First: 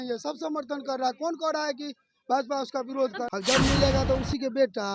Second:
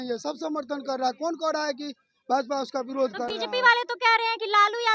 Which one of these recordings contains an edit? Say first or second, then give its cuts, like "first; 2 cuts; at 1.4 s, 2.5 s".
first; 1 cut; at 3.3 s